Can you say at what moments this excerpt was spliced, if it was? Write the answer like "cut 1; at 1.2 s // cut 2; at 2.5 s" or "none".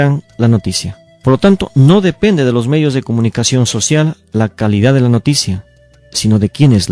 none